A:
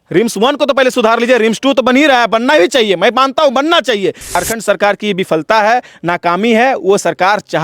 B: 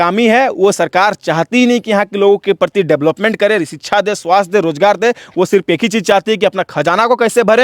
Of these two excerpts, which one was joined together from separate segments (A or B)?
A